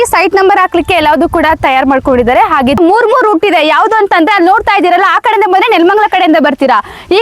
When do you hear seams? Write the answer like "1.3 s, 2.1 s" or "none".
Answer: 2.8 s